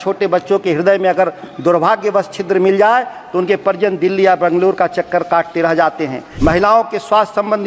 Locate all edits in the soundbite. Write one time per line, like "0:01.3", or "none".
0:06.2